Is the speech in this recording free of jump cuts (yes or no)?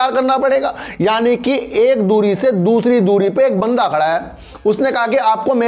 yes